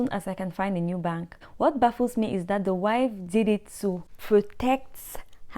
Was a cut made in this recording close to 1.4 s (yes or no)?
yes